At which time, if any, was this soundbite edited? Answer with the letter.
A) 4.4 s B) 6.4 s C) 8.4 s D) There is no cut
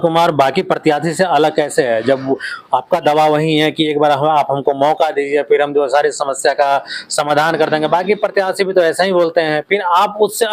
D